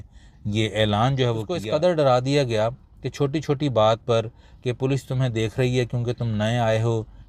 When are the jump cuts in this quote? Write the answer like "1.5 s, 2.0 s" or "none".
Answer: 1.5 s